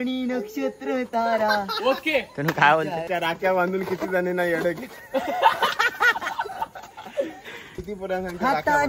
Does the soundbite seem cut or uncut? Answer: uncut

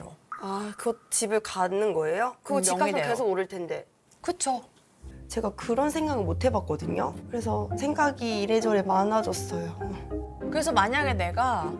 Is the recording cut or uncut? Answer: uncut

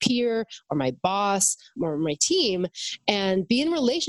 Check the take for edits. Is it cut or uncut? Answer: cut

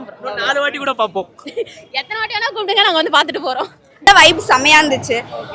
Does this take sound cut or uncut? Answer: cut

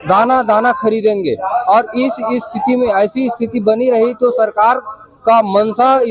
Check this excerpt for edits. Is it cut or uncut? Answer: uncut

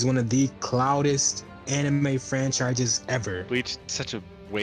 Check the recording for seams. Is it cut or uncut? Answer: cut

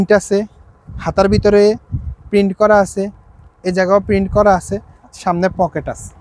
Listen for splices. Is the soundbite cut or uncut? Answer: uncut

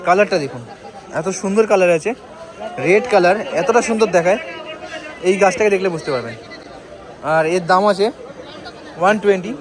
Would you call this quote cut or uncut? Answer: uncut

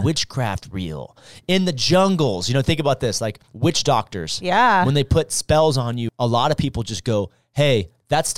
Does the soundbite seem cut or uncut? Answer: cut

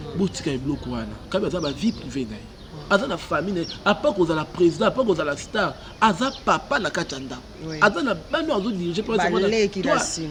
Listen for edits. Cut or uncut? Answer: uncut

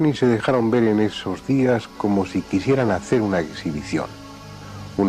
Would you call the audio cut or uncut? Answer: uncut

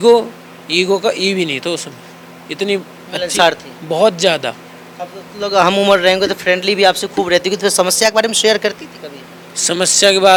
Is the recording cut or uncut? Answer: uncut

